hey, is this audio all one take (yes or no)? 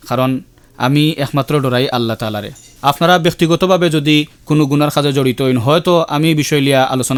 yes